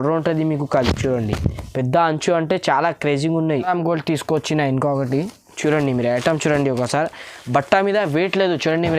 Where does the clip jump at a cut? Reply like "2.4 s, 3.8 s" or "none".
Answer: 3.7 s